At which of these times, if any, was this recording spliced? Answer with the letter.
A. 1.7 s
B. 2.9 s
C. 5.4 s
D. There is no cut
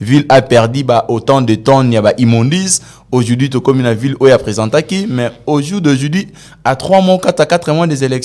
D